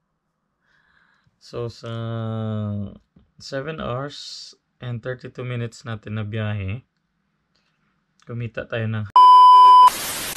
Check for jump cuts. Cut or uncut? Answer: cut